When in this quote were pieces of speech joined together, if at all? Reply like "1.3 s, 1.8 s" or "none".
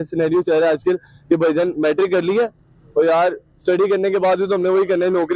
none